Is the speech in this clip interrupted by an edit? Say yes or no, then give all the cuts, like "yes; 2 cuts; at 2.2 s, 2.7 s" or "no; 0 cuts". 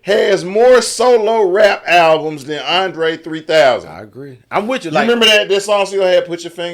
no; 0 cuts